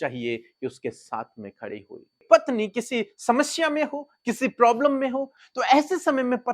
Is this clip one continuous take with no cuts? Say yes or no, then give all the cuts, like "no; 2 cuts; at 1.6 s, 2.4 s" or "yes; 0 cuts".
no; 2 cuts; at 2.2 s, 5.4 s